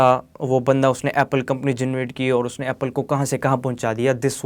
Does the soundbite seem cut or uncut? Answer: uncut